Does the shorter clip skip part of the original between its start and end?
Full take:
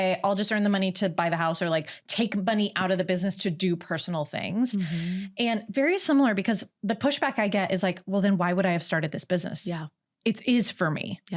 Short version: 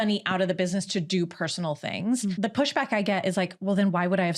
yes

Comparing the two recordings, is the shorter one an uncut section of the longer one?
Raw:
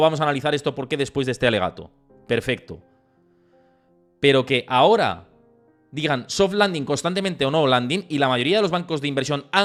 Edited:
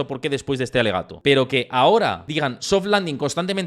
no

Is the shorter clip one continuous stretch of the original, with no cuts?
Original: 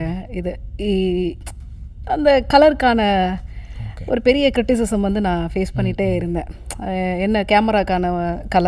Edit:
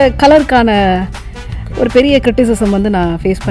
yes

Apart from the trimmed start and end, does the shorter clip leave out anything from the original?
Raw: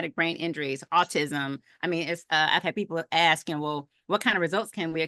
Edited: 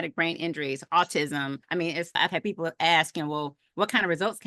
yes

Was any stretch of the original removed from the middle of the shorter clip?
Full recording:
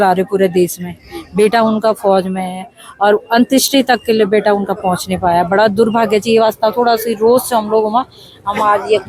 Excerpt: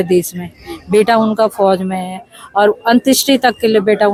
no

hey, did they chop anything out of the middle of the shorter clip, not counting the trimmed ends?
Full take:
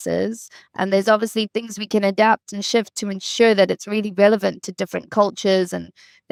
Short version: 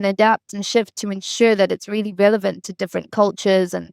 no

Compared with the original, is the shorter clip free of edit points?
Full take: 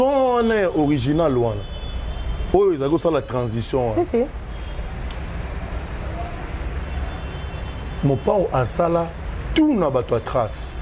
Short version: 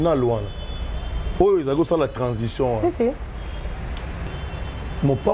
no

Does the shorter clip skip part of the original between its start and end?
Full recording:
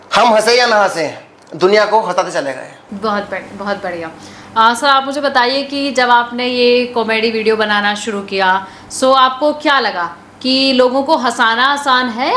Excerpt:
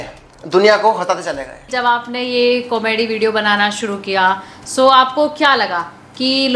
yes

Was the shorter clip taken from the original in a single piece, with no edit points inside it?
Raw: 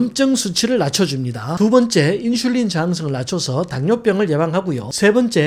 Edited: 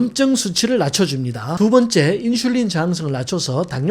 yes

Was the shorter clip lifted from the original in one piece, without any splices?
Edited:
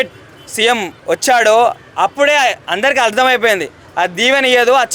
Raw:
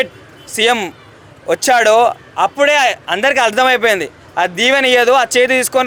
no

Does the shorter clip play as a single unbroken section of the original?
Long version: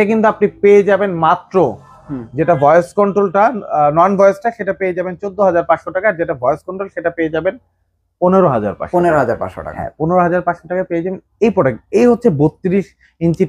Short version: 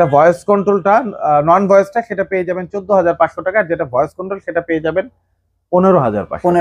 yes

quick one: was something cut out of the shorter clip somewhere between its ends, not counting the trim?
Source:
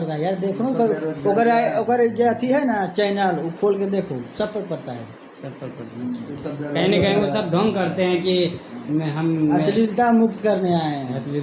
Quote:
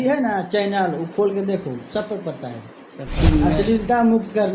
yes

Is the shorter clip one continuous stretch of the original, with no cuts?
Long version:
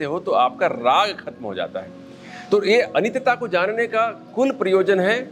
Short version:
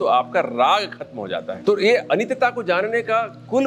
no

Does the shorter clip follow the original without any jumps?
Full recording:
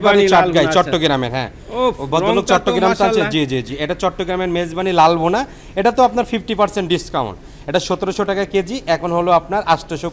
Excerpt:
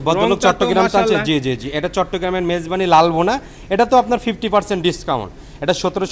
yes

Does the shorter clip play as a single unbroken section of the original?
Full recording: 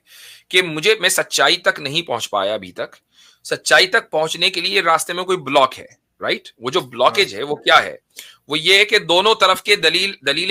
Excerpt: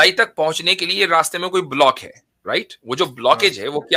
yes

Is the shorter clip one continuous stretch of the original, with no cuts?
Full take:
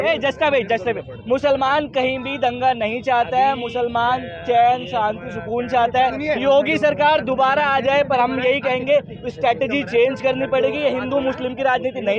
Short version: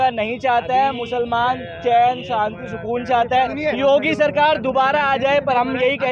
yes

